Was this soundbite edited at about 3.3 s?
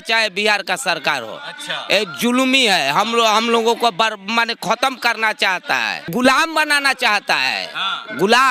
no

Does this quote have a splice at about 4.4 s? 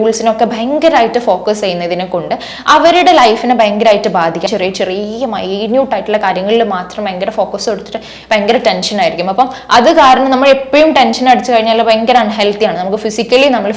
yes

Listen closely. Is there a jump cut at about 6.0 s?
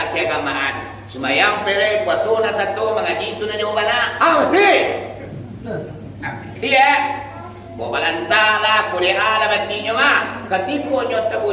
no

